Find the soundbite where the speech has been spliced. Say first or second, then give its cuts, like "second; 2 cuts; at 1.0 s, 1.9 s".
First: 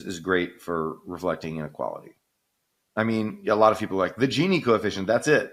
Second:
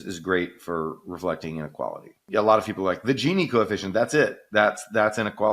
second; 1 cut; at 2.2 s